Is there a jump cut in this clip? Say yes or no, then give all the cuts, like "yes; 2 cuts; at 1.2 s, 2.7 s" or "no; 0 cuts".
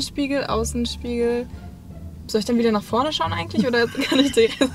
no; 0 cuts